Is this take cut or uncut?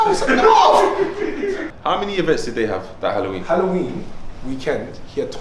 cut